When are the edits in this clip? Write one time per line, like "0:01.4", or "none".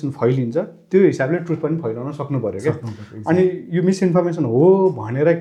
none